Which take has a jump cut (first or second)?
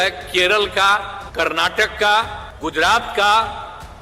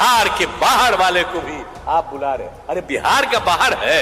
first